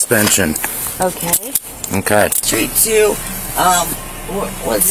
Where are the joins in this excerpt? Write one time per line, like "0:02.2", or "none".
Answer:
0:02.4